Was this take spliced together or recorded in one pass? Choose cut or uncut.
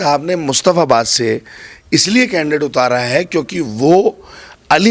uncut